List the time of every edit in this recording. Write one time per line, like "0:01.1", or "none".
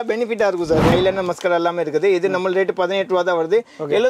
0:00.9